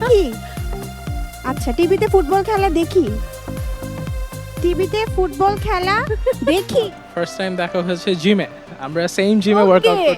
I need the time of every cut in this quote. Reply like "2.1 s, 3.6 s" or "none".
7.0 s